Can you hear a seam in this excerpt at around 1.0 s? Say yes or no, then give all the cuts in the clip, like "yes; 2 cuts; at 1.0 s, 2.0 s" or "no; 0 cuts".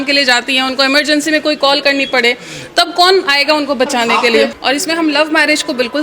no; 1 cut; at 4.6 s